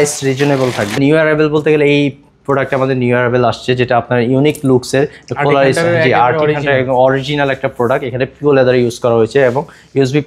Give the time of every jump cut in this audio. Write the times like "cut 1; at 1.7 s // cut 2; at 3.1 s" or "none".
cut 1; at 1.0 s

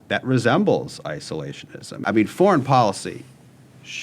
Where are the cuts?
cut 1; at 2.0 s

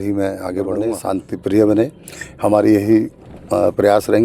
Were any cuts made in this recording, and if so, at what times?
cut 1; at 1.0 s

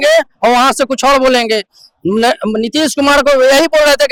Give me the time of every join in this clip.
none

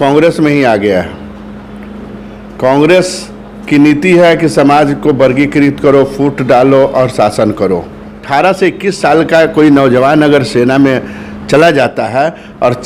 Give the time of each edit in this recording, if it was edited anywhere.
cut 1; at 8.2 s

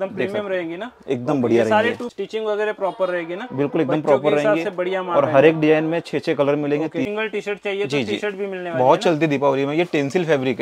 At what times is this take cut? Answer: cut 1; at 2.1 s // cut 2; at 7.1 s

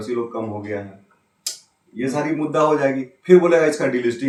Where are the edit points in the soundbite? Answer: none

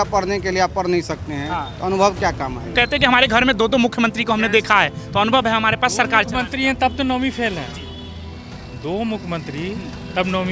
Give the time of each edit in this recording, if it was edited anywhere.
cut 1; at 2.7 s

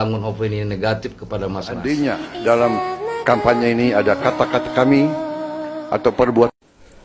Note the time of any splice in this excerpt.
cut 1; at 1.9 s

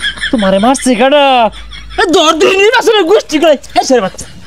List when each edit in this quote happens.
none

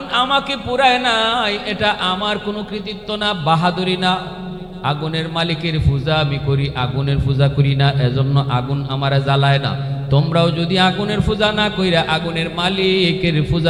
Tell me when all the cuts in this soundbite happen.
none

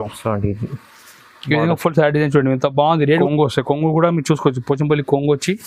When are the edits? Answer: cut 1; at 3.2 s

